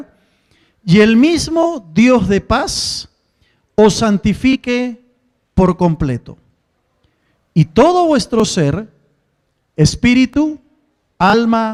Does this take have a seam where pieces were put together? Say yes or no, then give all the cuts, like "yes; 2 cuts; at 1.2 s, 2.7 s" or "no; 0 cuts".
no; 0 cuts